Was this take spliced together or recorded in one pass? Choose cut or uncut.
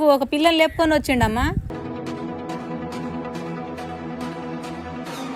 uncut